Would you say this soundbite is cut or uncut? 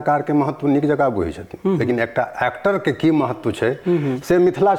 uncut